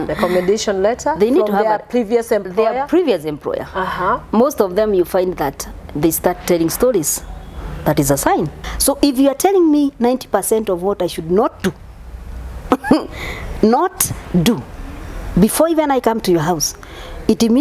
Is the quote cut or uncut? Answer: cut